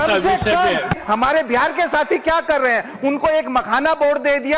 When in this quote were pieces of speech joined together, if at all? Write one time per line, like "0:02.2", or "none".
0:01.0